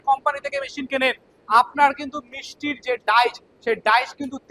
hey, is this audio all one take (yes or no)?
yes